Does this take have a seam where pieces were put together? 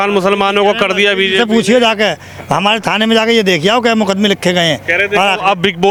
no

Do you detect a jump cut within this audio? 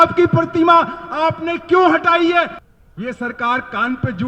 yes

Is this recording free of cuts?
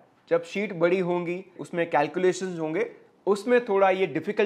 no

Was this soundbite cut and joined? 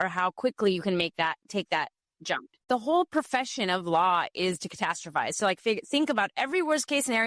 yes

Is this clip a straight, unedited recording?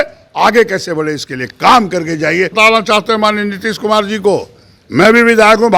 no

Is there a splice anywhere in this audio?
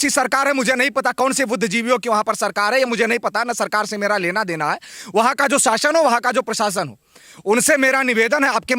no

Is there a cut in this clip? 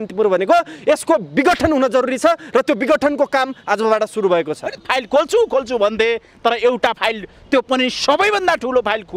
yes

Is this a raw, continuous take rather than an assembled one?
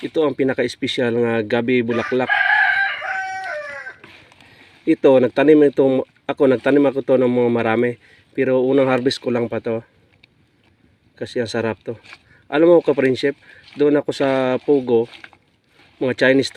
yes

